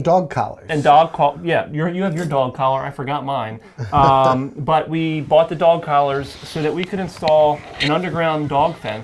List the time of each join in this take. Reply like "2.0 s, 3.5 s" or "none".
none